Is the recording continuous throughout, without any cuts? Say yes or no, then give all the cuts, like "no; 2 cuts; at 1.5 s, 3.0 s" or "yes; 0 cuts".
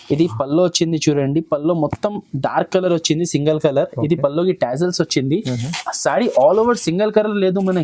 yes; 0 cuts